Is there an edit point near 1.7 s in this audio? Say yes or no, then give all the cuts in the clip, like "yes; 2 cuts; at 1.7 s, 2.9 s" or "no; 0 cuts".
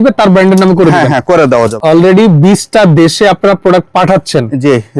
yes; 1 cut; at 1.7 s